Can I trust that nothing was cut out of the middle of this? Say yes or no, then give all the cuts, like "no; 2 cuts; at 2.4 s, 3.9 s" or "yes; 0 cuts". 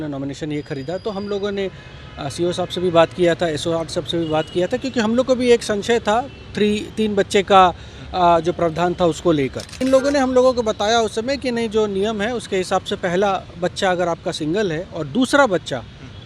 no; 1 cut; at 9.8 s